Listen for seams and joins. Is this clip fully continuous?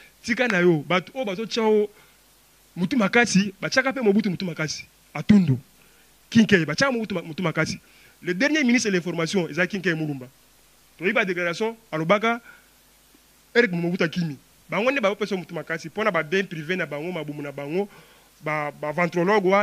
yes; 0 cuts

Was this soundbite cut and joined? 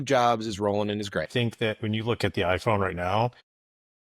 yes; 1 cut; at 1.3 s

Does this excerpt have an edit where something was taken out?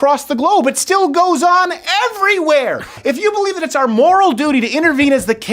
yes; 1 cut; at 2.9 s

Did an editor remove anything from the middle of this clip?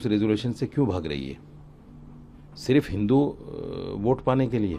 no; 0 cuts

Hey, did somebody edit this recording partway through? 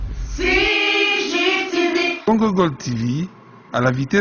no; 0 cuts

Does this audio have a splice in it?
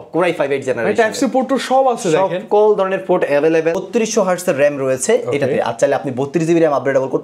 yes; 1 cut; at 3.8 s

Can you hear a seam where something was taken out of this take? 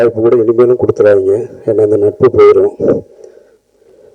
no; 0 cuts

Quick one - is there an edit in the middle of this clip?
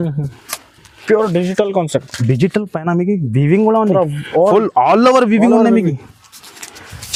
no; 0 cuts

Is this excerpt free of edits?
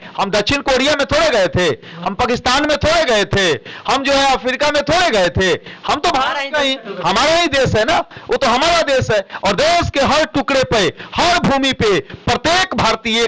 yes; 0 cuts

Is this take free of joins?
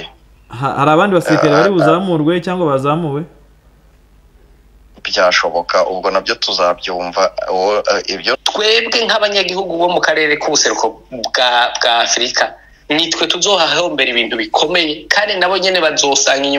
no; 1 cut; at 8.4 s

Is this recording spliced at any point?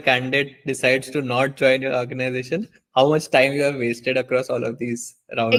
no; 0 cuts

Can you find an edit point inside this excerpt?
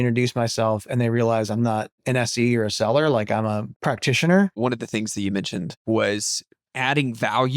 yes; 4 cuts; at 2.0 s, 3.7 s, 4.6 s, 5.8 s

